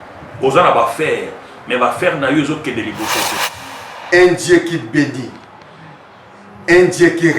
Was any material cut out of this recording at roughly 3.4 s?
yes; 1 cut; at 3.4 s

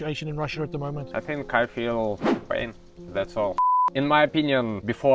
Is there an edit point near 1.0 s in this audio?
yes; 2 cuts; at 1.0 s, 3.8 s

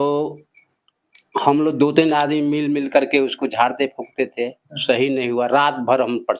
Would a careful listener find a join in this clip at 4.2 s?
no; 0 cuts

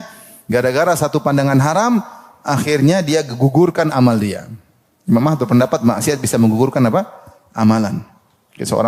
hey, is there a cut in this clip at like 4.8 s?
no; 0 cuts

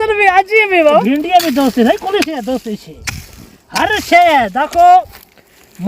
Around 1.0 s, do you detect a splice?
yes; 1 cut; at 1.0 s

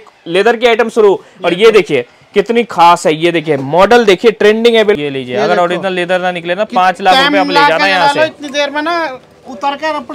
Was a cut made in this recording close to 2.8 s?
no; 1 cut; at 5.0 s

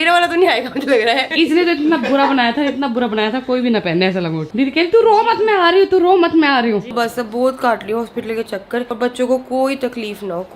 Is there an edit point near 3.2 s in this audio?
no; 4 cuts; at 1.3 s, 4.4 s, 6.9 s, 8.9 s

